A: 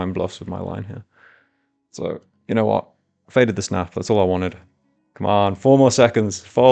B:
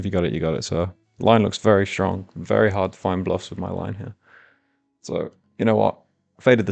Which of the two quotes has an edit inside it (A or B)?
B